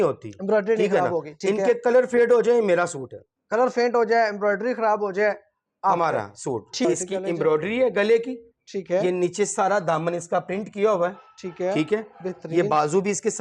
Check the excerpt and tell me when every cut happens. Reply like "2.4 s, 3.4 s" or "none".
6.8 s